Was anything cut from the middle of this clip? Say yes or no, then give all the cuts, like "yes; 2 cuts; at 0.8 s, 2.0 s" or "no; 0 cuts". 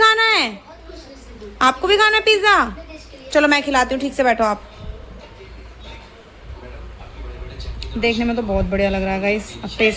no; 0 cuts